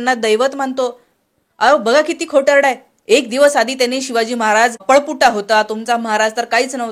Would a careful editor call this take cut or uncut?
cut